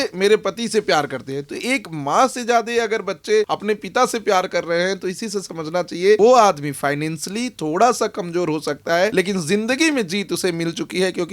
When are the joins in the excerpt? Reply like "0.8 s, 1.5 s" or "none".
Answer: 3.5 s, 6.2 s, 9.1 s

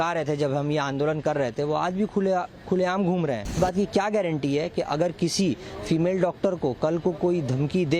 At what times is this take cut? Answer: 3.6 s

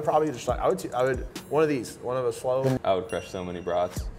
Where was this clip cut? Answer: 2.8 s

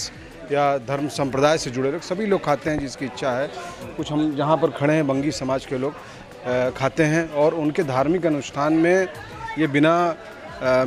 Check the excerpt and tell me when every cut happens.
none

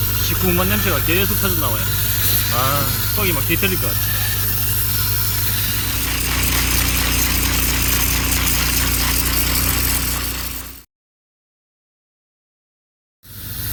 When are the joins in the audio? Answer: none

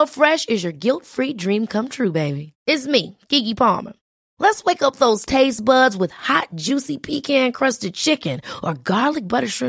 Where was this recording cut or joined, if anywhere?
none

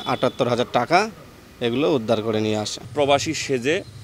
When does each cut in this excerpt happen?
2.8 s

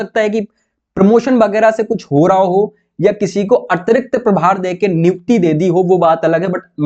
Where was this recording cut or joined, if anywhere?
none

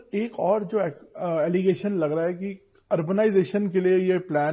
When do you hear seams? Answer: none

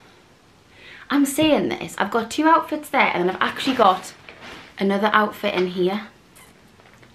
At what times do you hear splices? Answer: none

